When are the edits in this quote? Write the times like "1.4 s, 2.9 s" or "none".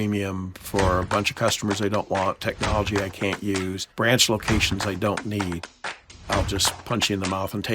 3.8 s, 6.2 s